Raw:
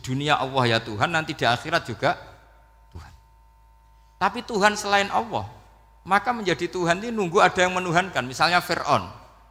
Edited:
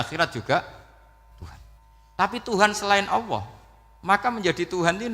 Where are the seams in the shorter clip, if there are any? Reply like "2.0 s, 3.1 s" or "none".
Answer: 1.7 s